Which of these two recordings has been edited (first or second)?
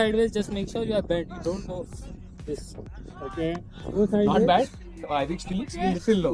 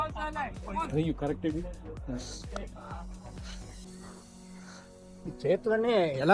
first